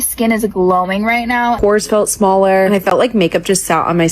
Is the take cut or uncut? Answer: cut